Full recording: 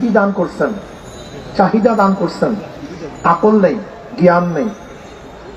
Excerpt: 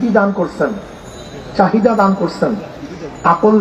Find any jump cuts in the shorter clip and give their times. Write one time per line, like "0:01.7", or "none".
none

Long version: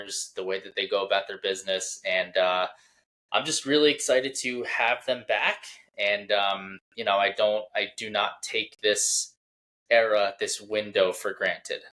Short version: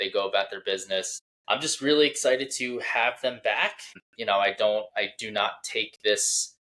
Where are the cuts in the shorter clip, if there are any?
0:01.2
0:04.0

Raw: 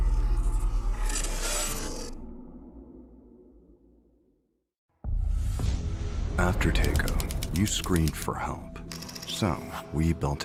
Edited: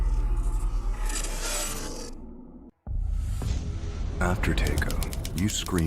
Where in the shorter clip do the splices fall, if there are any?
0:02.7

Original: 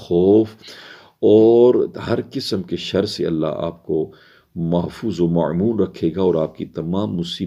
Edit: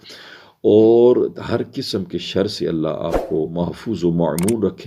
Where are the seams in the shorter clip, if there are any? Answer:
0:03.5

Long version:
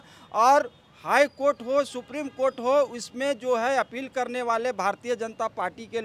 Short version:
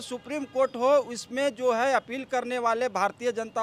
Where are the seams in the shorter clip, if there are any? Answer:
none

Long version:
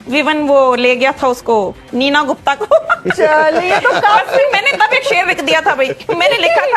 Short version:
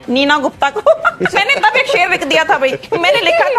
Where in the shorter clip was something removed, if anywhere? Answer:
0:01.3

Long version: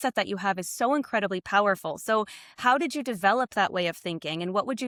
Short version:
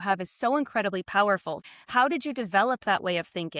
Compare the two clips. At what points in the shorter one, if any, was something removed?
0:01.6

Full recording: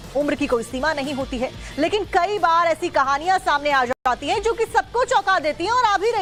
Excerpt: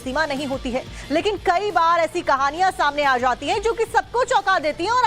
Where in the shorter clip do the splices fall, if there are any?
0:03.2

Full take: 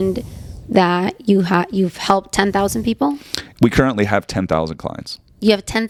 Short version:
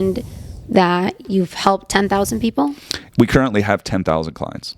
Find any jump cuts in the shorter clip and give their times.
0:01.2

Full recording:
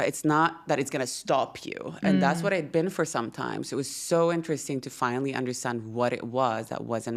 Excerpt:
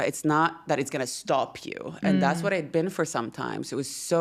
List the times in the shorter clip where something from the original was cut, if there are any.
none

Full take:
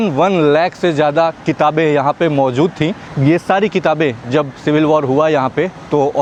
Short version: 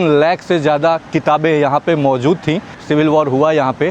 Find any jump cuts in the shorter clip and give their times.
0:02.8

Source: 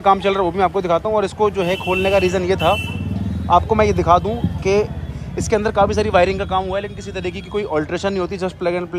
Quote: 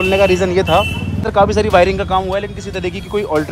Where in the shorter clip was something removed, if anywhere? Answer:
0:01.3

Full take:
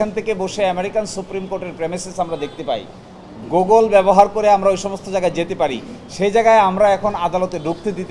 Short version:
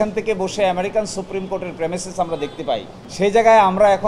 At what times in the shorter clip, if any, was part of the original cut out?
0:03.0

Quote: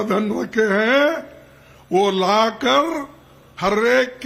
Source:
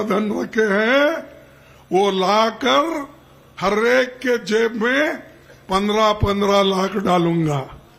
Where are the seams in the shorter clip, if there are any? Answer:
none

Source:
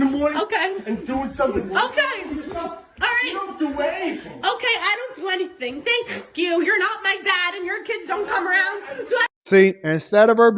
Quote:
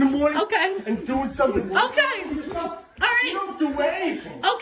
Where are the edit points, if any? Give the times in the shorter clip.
none

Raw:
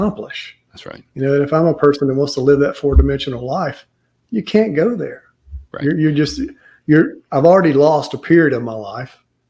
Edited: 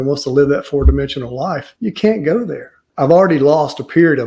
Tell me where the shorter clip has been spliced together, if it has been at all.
0:01.7
0:02.8

